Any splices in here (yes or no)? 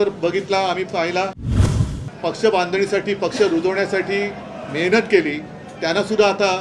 yes